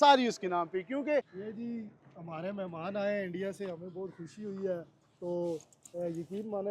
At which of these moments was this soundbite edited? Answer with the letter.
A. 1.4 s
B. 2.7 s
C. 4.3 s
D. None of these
A